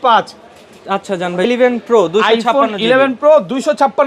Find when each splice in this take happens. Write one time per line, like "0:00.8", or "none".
0:01.5